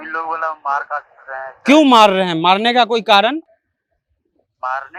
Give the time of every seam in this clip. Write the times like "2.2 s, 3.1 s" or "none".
none